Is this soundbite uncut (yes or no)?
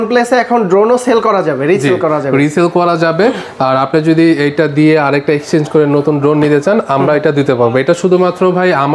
yes